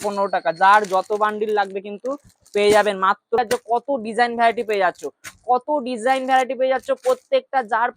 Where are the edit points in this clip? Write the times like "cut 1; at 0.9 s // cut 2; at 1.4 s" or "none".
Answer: cut 1; at 3.4 s